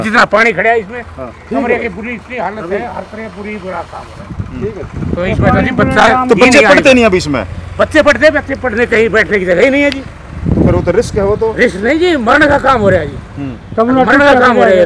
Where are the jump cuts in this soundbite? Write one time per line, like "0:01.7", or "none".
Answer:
none

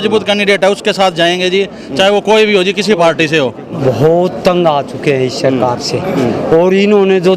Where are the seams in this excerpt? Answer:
0:03.8

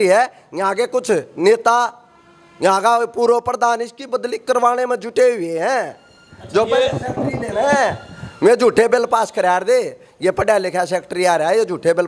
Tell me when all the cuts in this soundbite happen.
none

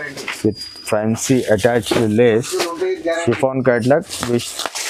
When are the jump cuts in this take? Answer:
none

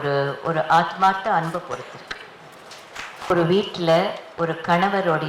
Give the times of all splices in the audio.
0:03.3

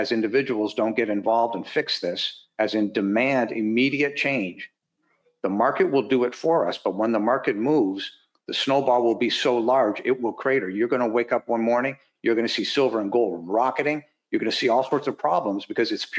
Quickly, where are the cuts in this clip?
none

